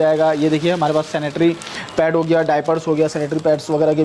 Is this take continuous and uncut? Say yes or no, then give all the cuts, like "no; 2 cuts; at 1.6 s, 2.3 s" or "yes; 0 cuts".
yes; 0 cuts